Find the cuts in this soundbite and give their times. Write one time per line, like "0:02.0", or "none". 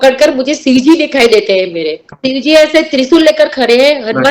0:02.1